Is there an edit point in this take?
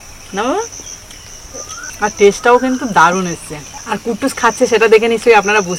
no; 0 cuts

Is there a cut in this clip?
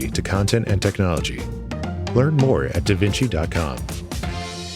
yes; 1 cut; at 3.8 s

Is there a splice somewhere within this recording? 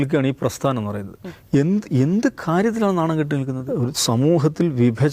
yes; 1 cut; at 3.6 s

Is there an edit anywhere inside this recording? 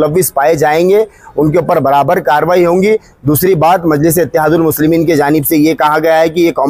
no; 0 cuts

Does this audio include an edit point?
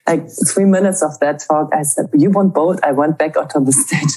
yes; 1 cut; at 2.1 s

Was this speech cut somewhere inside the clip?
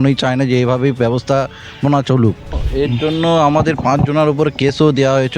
yes; 1 cut; at 2.6 s

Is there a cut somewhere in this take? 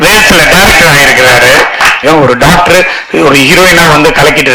yes; 1 cut; at 2.0 s

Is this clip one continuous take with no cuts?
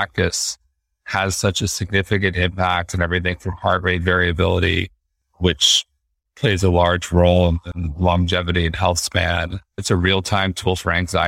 no; 1 cut; at 9.8 s

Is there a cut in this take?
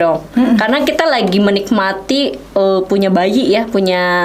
no; 0 cuts

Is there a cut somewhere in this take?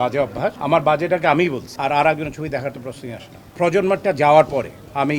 yes; 2 cuts; at 1.7 s, 3.5 s

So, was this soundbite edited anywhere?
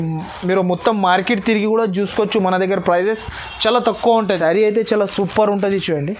yes; 1 cut; at 4.4 s

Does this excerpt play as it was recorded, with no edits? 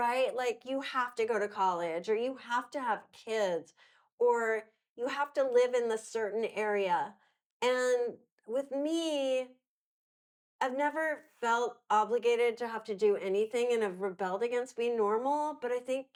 yes; 0 cuts

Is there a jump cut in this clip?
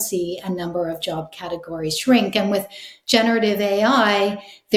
no; 0 cuts

